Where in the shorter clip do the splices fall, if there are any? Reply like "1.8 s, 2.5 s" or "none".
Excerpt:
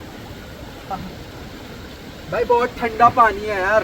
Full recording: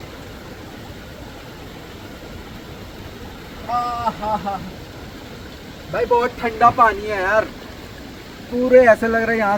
0.9 s

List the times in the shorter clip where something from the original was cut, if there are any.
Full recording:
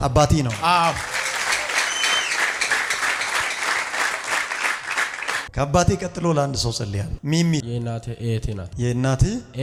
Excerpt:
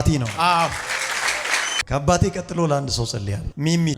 1.8 s

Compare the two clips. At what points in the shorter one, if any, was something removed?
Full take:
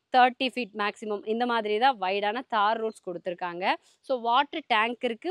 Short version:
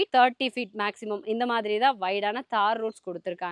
none

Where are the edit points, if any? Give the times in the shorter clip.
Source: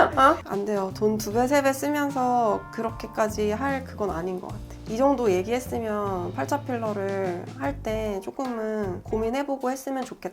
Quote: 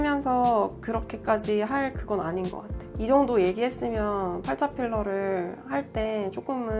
none

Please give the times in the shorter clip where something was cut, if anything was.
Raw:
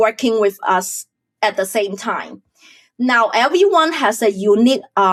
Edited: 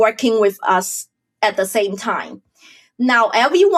none

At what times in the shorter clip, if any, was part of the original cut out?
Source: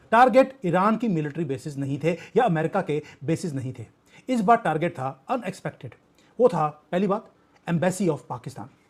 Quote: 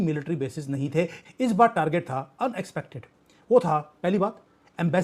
1.2 s

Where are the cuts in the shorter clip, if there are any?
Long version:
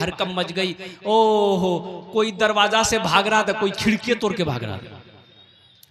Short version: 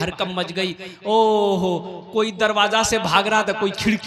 none

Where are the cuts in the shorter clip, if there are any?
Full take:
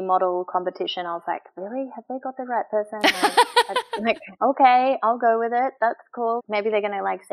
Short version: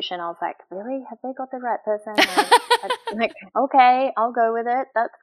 none

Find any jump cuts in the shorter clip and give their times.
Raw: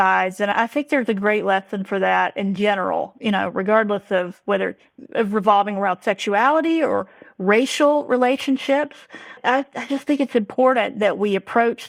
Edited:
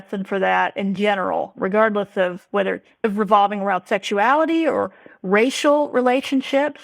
1.6 s, 2.9 s

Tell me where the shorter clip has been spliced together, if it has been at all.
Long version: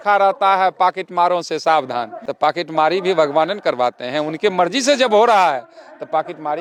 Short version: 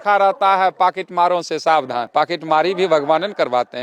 2.1 s

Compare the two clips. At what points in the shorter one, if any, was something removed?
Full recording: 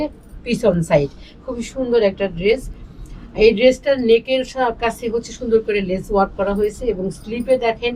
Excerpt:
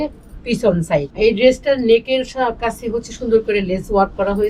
1.1 s

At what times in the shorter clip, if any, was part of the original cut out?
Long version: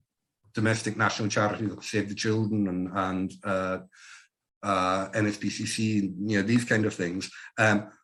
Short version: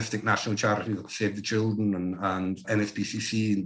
2.6 s

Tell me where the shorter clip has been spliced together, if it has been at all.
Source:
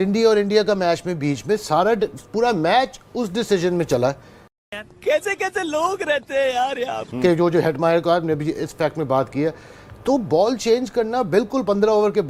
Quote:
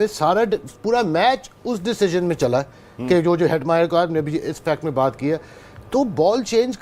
2.9 s

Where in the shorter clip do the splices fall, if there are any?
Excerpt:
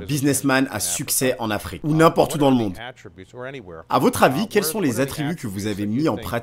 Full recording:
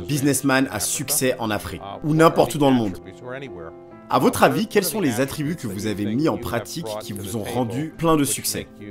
1.7 s

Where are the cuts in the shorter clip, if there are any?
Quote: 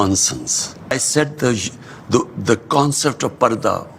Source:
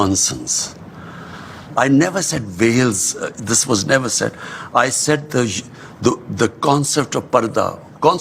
0.9 s

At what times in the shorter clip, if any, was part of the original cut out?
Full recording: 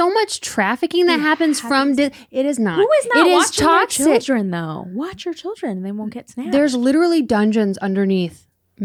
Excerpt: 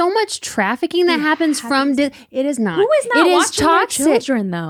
none

